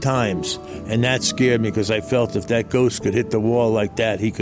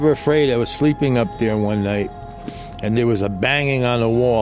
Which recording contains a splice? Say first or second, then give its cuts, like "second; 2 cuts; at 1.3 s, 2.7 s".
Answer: second; 1 cut; at 2.8 s